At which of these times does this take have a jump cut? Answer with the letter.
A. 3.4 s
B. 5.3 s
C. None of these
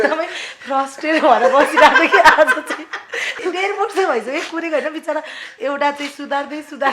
A